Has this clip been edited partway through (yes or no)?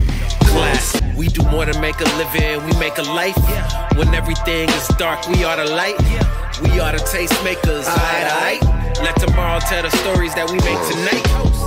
no